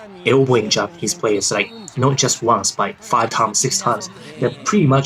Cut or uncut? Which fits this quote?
uncut